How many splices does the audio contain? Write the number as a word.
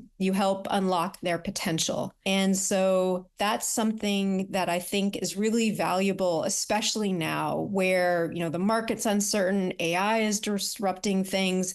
two